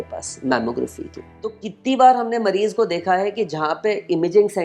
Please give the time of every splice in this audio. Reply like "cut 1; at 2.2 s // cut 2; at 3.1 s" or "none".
cut 1; at 1.7 s